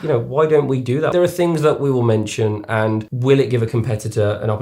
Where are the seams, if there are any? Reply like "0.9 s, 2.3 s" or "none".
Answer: 1.1 s, 3.1 s